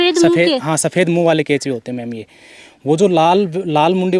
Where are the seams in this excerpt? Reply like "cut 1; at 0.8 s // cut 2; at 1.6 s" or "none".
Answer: none